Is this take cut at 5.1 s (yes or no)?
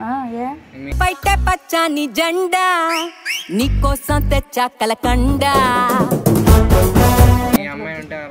no